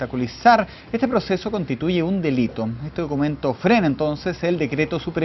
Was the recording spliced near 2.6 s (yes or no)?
yes